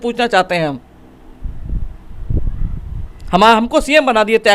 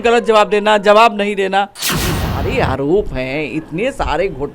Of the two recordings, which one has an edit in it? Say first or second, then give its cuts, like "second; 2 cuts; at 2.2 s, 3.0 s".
second; 1 cut; at 2.2 s